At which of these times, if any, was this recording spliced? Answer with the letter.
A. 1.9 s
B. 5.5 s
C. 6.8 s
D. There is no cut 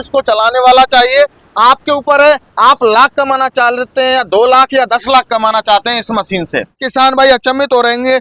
C